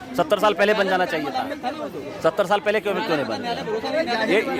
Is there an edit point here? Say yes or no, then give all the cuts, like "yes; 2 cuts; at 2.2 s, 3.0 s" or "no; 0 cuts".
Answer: no; 0 cuts